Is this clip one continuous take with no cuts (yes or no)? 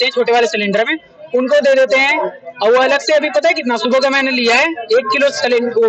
yes